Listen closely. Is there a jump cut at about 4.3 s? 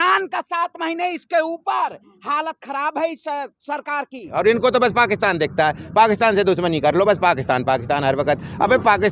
yes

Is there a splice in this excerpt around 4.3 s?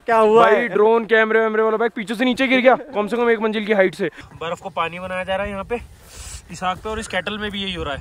yes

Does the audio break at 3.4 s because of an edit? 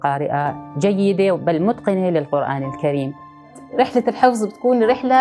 yes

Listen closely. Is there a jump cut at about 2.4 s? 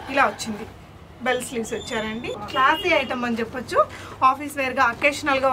yes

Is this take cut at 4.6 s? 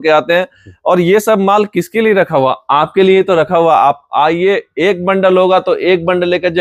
no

